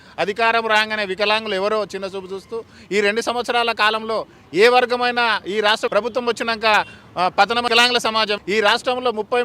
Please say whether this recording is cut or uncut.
cut